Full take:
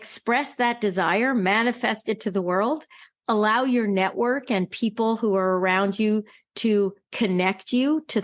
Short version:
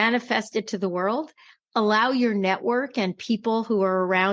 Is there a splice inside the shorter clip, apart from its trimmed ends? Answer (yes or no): no